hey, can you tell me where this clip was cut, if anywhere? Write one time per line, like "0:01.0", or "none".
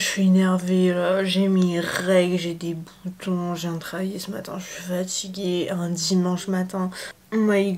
none